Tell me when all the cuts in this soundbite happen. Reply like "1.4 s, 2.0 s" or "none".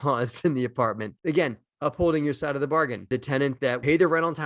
none